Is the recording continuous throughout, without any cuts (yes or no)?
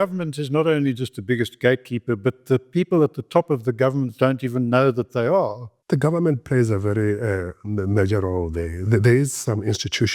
no